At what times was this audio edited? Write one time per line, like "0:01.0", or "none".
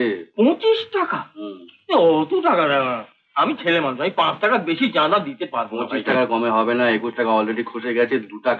none